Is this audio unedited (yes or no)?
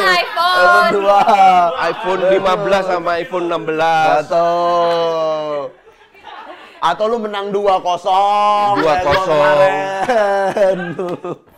yes